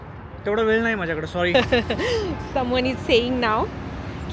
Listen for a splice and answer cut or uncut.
cut